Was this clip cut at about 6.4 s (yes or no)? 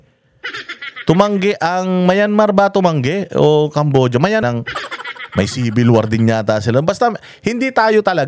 no